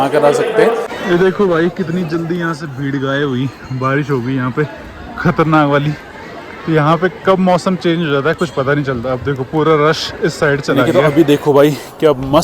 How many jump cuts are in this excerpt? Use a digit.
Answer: 2